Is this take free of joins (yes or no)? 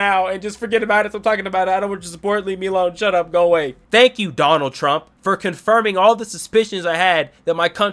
no